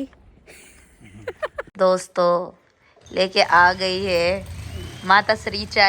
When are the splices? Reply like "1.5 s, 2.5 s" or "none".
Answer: 1.7 s